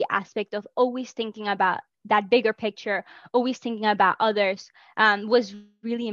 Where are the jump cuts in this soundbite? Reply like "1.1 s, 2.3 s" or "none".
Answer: none